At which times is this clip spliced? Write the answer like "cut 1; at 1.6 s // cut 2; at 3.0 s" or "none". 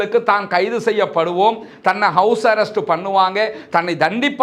none